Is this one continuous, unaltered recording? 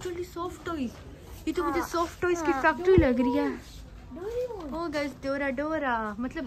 yes; 0 cuts

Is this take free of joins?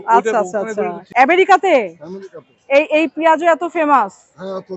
no; 1 cut; at 1.0 s

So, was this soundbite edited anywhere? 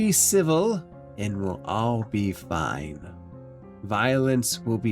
yes; 1 cut; at 1.0 s

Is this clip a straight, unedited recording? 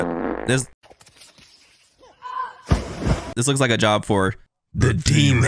yes; 0 cuts

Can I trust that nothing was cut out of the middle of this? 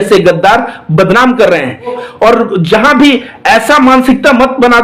no; 1 cut; at 2.0 s

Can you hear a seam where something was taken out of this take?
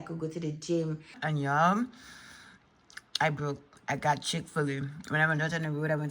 yes; 1 cut; at 1.2 s

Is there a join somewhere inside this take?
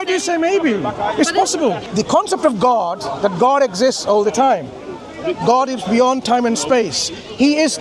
yes; 1 cut; at 1.8 s

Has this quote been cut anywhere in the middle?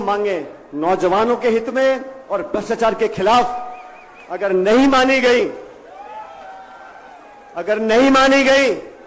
no; 0 cuts

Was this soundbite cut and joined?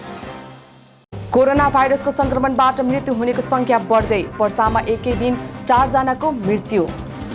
no; 0 cuts

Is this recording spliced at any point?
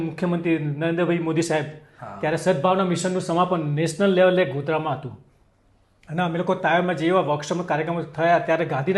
no; 0 cuts

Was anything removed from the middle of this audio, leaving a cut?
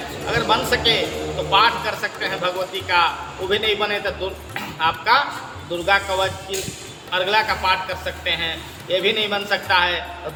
no; 0 cuts

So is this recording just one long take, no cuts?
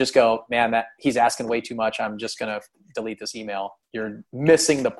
no; 1 cut; at 3.8 s

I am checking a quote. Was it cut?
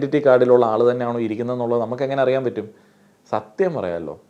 no; 0 cuts

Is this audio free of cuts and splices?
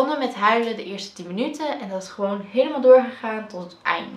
yes; 0 cuts

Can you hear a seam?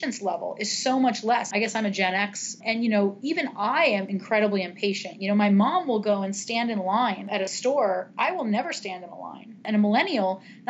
yes; 5 cuts; at 1.5 s, 2.6 s, 4.1 s, 7.3 s, 9.6 s

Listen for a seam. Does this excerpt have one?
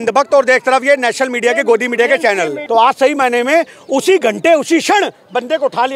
yes; 1 cut; at 2.6 s

